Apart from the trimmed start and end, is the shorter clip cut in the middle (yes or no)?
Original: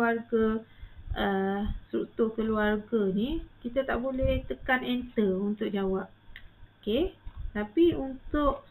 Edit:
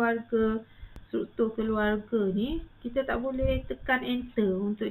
yes